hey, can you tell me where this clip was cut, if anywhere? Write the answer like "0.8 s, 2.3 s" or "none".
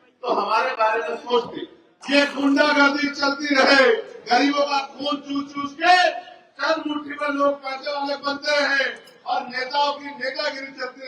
2.0 s